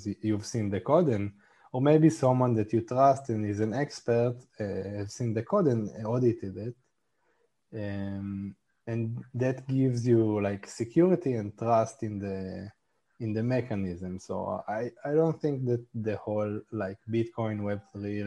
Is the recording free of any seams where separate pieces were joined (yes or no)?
yes